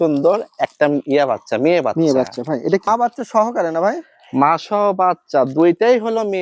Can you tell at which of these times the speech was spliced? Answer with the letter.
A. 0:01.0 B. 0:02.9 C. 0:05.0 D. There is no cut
B